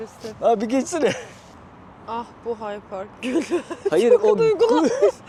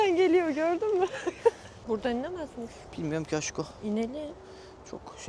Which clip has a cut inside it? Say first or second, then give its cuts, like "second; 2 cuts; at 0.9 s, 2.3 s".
second; 1 cut; at 1.7 s